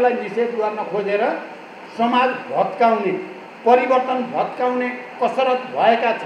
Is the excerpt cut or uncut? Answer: uncut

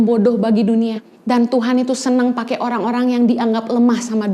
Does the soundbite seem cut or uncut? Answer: cut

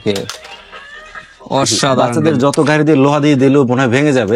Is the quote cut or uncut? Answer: cut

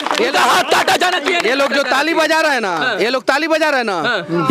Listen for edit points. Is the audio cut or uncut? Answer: uncut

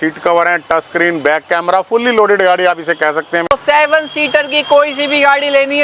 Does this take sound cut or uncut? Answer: cut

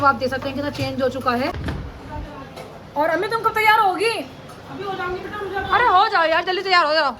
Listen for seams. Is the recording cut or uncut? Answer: cut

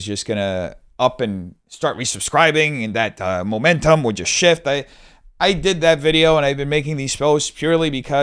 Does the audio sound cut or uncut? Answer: uncut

